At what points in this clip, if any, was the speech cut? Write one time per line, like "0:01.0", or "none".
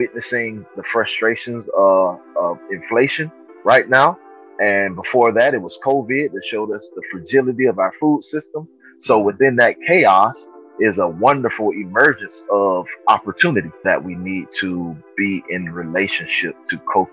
0:13.8